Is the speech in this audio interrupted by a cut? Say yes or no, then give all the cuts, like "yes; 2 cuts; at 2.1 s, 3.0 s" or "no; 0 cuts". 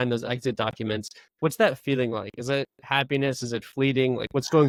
no; 0 cuts